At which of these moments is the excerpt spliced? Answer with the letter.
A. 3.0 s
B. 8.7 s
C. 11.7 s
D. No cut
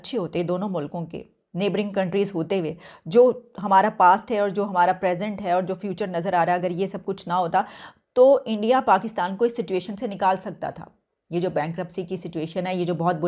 D